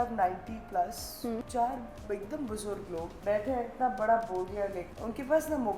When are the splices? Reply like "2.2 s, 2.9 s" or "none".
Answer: 1.5 s, 3.1 s, 4.8 s